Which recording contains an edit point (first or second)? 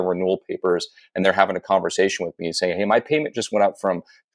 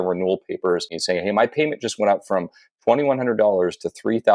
second